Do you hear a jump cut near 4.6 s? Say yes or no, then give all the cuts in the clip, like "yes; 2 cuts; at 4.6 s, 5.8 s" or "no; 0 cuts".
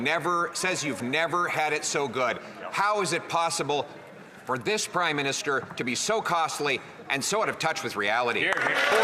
no; 0 cuts